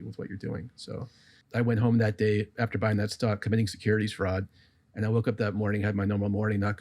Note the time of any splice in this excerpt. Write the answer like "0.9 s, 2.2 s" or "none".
1.4 s